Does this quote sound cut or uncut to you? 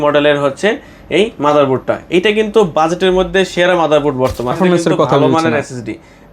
cut